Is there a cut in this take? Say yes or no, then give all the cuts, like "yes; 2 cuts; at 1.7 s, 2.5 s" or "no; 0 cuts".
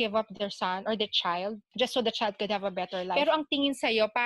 yes; 1 cut; at 3.1 s